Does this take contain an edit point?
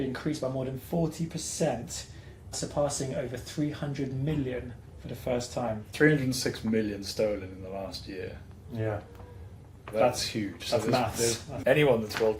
yes; 3 cuts; at 2.6 s, 5.9 s, 11.5 s

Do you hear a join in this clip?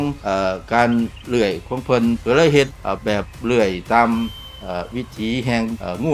no; 0 cuts

